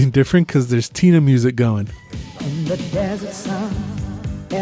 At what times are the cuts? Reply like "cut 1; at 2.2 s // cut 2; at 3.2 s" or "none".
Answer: cut 1; at 2.4 s